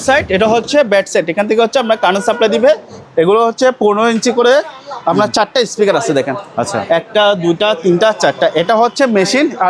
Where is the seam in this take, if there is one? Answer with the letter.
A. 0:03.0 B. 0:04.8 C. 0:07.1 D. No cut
A